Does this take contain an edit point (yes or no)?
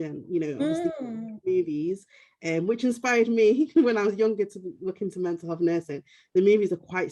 no